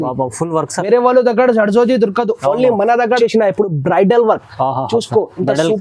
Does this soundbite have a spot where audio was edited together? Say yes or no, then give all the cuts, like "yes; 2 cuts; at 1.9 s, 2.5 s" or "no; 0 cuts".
yes; 1 cut; at 3.2 s